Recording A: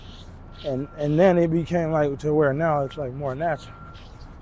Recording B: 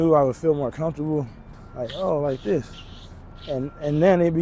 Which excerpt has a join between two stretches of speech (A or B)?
B